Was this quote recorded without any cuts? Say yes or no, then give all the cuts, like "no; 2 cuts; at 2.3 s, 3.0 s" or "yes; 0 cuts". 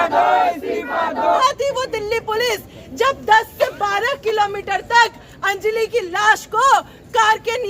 no; 1 cut; at 1.4 s